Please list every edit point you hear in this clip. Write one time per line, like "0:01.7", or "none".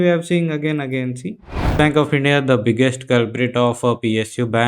0:01.8